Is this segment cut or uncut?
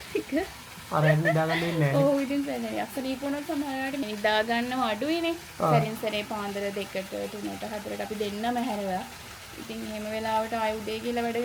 uncut